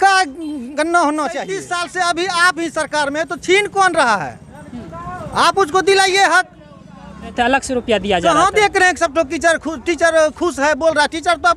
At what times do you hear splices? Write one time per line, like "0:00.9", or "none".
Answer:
0:01.8
0:07.3